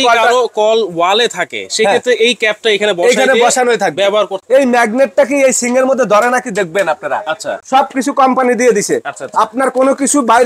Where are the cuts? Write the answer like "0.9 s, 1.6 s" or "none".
4.4 s, 7.5 s